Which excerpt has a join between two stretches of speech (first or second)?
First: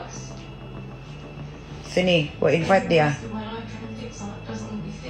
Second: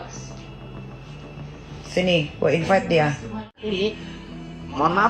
second